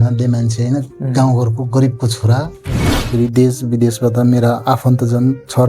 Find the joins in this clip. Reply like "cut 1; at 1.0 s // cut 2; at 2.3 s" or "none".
cut 1; at 2.9 s